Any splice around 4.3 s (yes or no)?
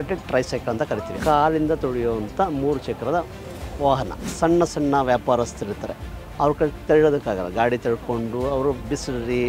yes